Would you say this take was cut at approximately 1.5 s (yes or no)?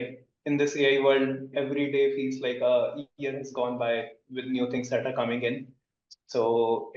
yes